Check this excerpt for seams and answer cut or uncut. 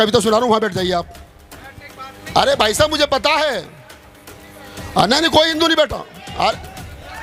uncut